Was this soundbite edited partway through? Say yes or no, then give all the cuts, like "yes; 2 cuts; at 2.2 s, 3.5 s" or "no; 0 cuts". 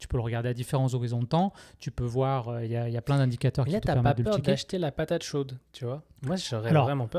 no; 0 cuts